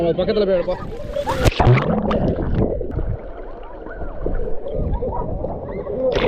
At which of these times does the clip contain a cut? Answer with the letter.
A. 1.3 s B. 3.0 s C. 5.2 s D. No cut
B